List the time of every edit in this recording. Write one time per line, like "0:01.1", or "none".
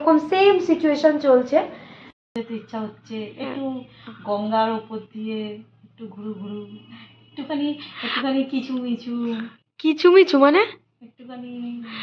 0:02.3